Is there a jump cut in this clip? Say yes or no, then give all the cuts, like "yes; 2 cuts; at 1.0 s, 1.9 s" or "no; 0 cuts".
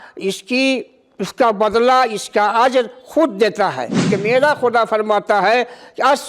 yes; 1 cut; at 4.1 s